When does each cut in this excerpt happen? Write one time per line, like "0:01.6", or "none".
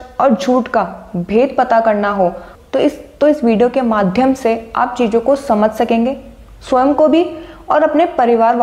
none